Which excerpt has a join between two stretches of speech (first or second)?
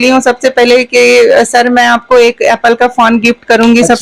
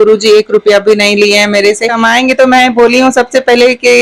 second